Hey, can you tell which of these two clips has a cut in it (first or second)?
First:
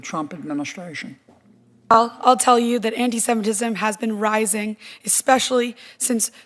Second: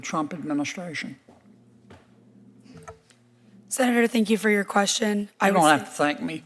first